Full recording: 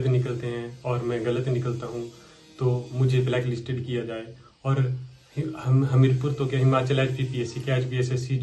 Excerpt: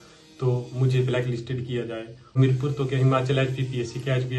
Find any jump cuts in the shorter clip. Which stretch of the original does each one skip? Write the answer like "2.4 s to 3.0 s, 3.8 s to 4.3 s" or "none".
4.5 s to 5.9 s